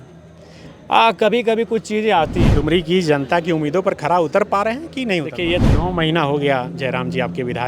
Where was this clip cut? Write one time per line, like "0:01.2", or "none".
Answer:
0:02.5
0:05.6